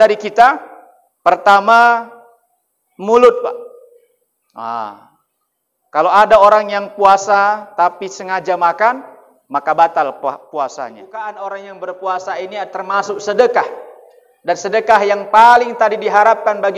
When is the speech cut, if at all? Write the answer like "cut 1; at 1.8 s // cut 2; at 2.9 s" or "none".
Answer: cut 1; at 11.1 s